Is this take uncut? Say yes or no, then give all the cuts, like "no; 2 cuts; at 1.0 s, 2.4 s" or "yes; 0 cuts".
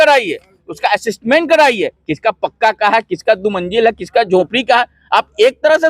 yes; 0 cuts